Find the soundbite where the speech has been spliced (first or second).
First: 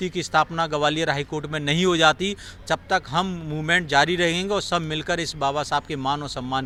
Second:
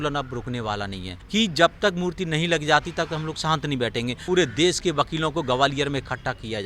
second